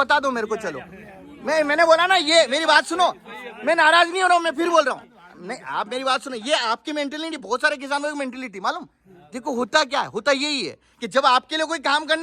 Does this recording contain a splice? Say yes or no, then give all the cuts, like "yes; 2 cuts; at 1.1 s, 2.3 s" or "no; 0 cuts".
no; 0 cuts